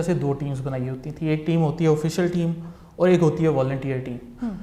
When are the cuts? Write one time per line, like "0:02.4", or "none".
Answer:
none